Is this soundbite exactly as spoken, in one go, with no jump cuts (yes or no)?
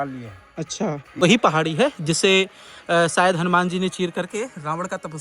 no